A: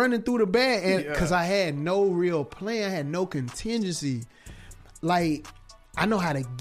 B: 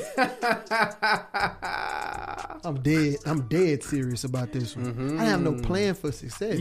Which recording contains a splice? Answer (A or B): B